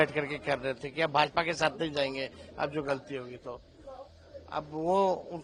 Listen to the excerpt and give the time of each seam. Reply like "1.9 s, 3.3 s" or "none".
none